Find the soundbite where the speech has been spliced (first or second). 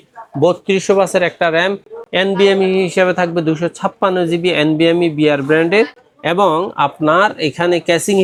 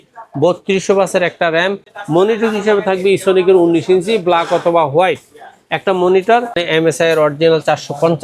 second